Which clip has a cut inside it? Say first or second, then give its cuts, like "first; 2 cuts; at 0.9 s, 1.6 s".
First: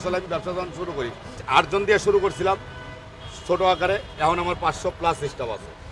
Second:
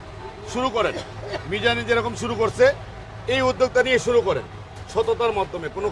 first; 1 cut; at 1.4 s